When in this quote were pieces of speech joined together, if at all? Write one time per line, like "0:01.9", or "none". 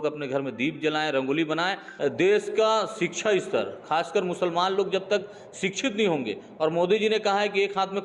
0:01.8